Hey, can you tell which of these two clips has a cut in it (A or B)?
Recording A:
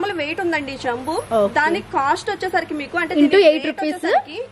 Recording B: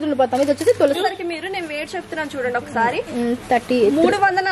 B